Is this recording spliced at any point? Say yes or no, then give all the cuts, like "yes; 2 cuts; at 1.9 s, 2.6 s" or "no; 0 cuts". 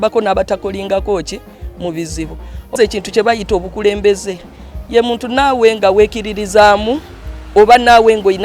yes; 1 cut; at 2.8 s